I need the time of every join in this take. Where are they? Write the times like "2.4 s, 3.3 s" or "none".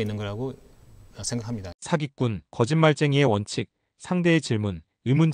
none